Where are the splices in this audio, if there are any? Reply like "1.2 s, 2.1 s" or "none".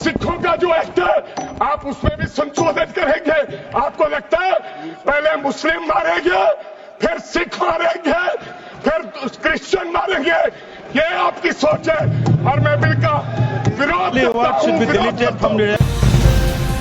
none